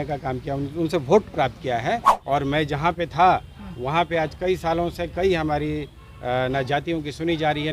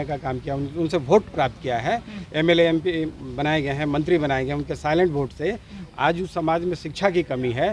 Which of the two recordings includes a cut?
first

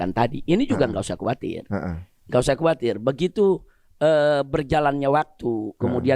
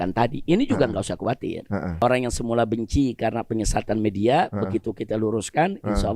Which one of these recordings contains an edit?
second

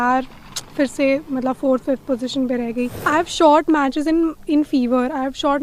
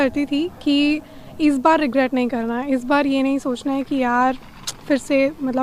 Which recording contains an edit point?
first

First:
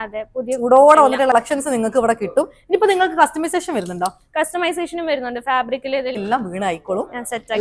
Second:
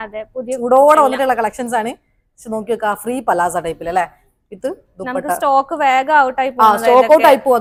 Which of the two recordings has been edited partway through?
first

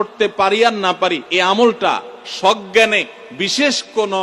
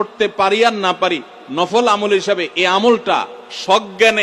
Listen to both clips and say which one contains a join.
first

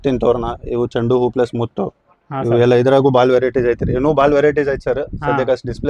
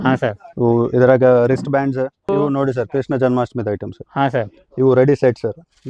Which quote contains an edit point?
second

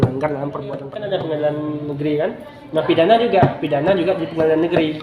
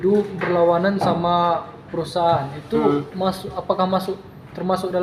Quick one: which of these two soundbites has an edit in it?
first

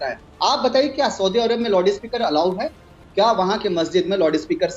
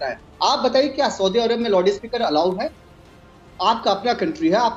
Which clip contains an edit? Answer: first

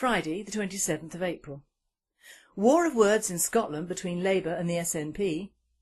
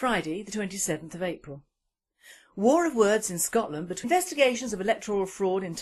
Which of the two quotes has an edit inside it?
first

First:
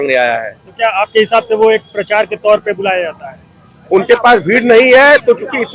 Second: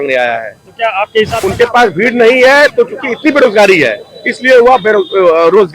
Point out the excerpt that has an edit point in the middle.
second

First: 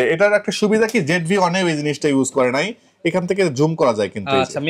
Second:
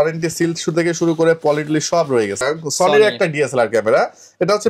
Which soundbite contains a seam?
second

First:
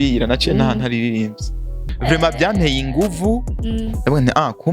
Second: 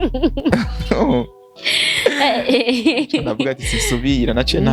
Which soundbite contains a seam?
first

